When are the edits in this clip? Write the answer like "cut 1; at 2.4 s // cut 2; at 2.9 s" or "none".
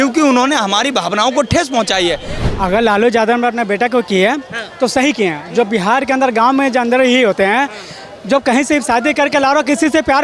cut 1; at 2.3 s